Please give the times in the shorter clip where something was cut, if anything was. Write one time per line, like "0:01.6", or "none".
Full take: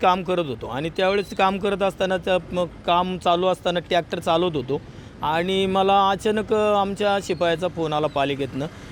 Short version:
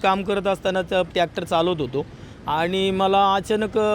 0:01.1